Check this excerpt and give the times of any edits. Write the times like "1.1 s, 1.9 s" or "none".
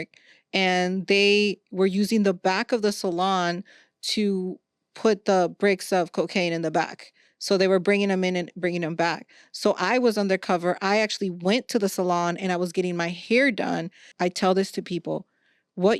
14.1 s